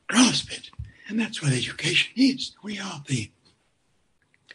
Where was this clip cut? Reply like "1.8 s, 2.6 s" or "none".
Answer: none